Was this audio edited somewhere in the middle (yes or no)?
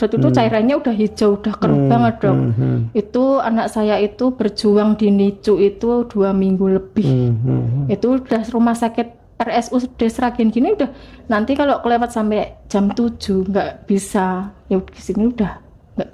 no